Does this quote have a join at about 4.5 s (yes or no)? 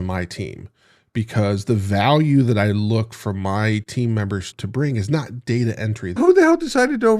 yes